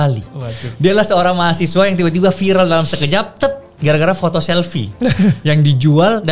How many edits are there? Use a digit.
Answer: 0